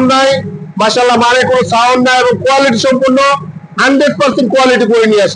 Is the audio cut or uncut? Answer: uncut